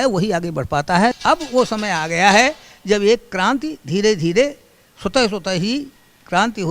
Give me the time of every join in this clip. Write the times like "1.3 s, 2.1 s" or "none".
1.2 s